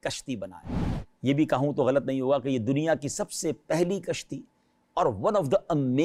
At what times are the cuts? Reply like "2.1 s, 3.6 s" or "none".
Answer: none